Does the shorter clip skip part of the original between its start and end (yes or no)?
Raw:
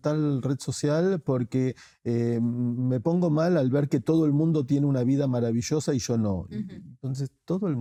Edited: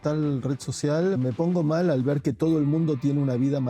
yes